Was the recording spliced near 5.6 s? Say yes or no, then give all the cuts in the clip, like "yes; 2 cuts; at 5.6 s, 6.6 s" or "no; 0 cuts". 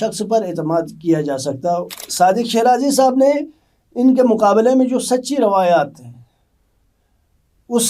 no; 1 cut; at 2.0 s